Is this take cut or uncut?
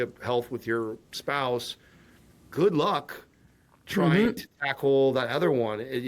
uncut